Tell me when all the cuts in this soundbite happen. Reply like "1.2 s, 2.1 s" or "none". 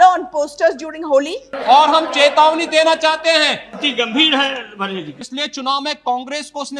1.5 s, 3.7 s, 5.1 s